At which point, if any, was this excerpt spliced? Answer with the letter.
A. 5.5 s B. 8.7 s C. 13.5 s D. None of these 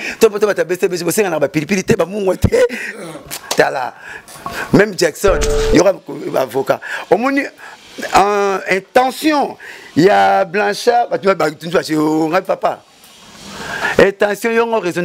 A